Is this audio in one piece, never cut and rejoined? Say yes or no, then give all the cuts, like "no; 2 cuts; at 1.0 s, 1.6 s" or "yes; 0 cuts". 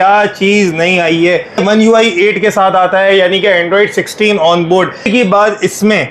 no; 2 cuts; at 1.6 s, 5.1 s